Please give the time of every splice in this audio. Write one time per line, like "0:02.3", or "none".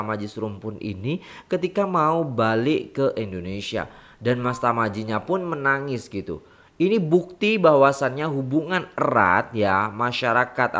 none